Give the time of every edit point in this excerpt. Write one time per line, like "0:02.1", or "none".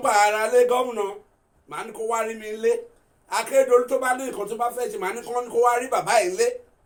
none